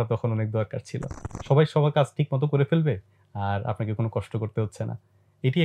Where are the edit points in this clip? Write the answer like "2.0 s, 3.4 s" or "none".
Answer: 1.3 s